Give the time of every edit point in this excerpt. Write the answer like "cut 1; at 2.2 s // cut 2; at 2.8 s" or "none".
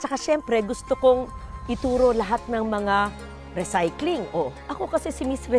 cut 1; at 4.6 s